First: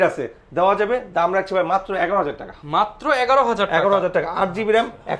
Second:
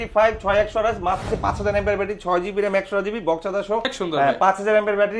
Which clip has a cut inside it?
second; 2 cuts; at 1.3 s, 3.9 s

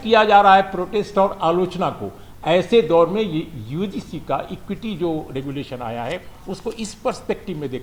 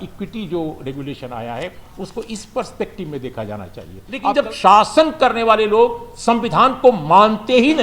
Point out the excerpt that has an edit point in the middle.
second; 1 cut; at 4.3 s

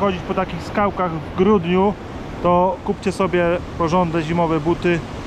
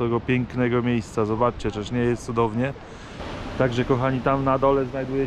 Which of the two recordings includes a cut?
second; 1 cut; at 3.3 s

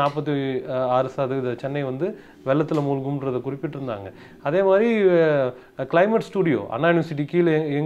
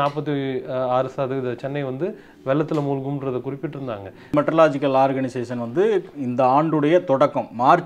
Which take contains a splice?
second; 1 cut; at 4.3 s

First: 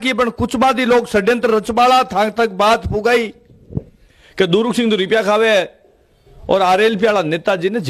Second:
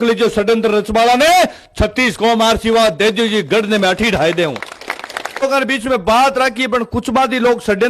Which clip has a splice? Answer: second; 1 cut; at 5.4 s

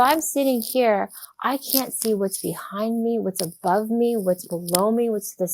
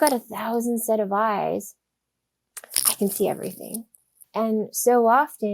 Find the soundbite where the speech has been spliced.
second; 1 cut; at 3.9 s

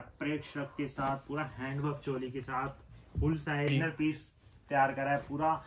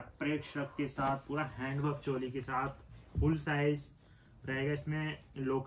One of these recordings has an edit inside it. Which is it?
first; 1 cut; at 3.7 s

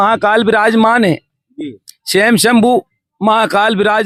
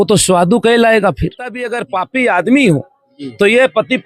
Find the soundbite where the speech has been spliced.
second; 1 cut; at 1.7 s

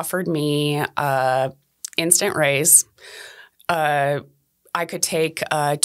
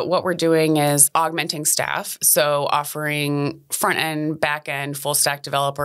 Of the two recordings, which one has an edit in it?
second; 1 cut; at 1.0 s

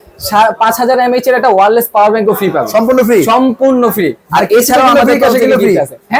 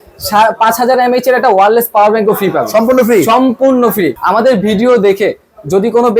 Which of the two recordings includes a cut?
second; 1 cut; at 4.2 s

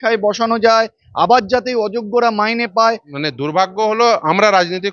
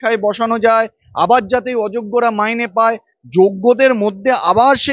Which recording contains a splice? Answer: first; 1 cut; at 3.1 s

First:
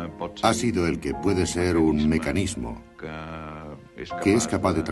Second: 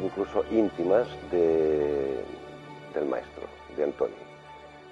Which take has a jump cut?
second; 1 cut; at 1.3 s

